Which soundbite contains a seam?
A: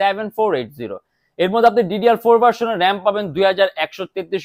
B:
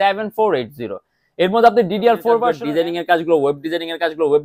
B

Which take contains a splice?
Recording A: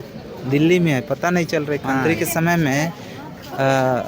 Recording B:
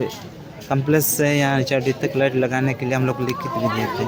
A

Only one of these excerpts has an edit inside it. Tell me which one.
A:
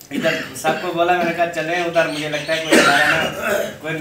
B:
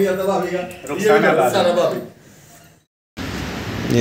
B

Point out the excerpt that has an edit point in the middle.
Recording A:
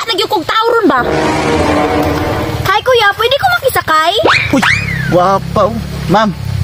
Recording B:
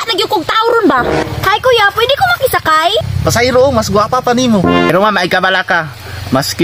B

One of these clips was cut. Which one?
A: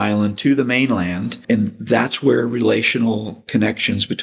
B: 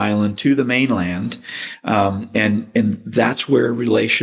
A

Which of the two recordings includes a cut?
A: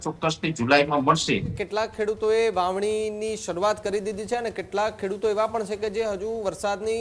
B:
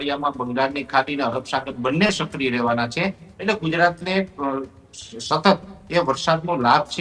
A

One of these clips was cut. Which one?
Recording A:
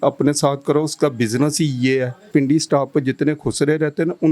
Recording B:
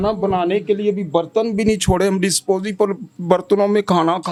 A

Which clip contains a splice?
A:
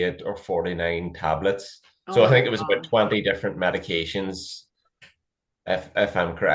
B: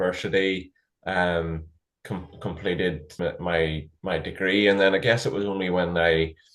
B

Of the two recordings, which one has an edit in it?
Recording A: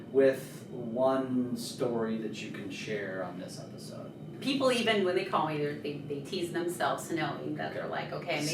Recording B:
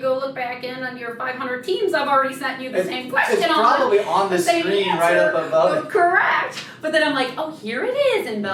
A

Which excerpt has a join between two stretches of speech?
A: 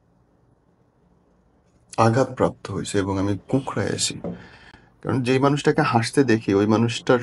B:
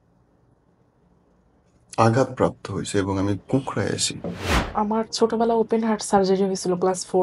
B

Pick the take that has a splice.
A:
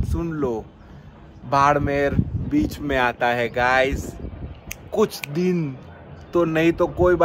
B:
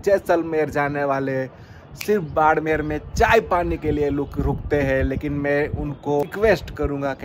B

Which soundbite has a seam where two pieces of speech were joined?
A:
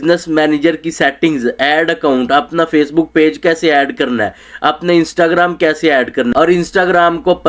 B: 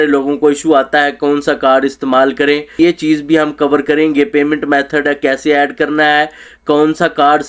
B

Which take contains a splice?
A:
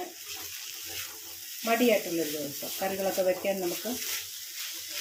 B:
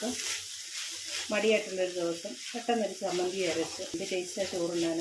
B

